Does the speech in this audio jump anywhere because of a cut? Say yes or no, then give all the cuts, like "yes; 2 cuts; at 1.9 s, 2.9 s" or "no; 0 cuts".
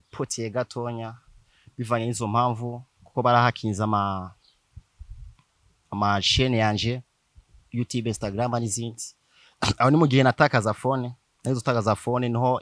no; 0 cuts